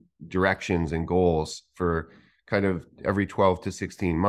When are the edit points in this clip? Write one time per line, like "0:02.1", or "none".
none